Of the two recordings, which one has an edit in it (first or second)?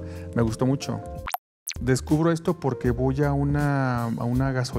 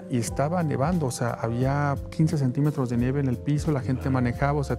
first